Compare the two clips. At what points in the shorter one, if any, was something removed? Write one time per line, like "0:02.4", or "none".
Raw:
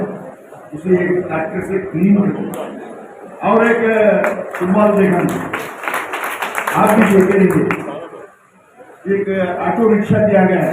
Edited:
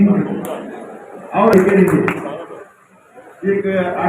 0:01.5